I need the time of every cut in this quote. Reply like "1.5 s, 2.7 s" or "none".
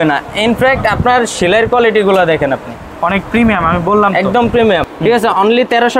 4.8 s